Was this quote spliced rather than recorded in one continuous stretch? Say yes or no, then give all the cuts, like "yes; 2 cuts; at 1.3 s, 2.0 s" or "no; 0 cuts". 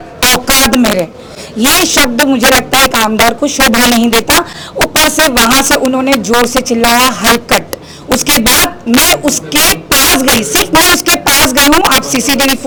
no; 0 cuts